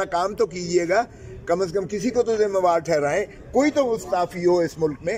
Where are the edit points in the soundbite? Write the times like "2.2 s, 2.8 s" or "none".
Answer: none